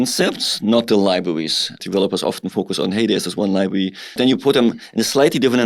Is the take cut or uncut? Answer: cut